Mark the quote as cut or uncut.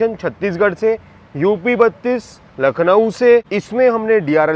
cut